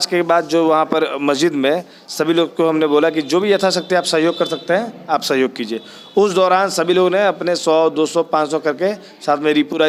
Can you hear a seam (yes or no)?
no